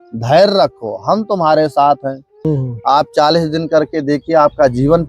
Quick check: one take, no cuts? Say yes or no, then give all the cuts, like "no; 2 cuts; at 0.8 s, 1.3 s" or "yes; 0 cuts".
no; 1 cut; at 2.3 s